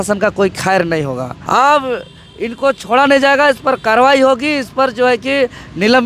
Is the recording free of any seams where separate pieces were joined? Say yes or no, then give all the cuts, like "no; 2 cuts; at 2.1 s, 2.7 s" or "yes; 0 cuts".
yes; 0 cuts